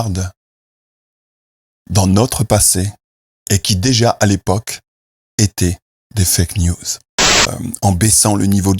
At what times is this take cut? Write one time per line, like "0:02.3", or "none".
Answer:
0:07.5